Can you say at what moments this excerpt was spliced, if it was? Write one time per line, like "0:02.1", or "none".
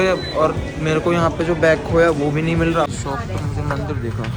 none

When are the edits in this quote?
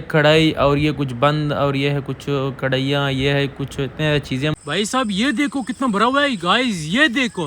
0:04.6

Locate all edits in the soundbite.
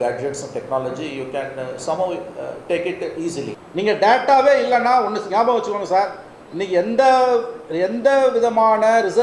0:03.6

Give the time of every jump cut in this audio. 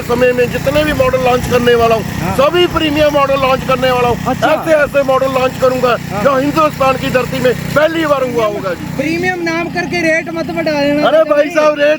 0:08.8

